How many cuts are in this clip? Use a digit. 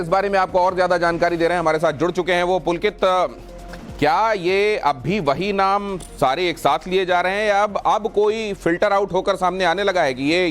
1